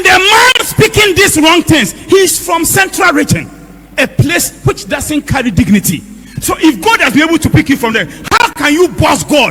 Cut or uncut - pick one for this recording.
uncut